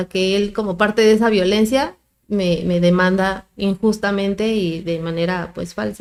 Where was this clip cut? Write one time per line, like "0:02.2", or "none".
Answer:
none